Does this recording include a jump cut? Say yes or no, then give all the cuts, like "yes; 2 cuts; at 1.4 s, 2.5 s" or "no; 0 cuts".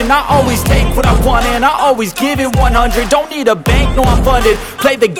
no; 0 cuts